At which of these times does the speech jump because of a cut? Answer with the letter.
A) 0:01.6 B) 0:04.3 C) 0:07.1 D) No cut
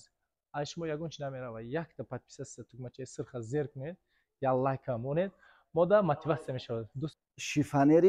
C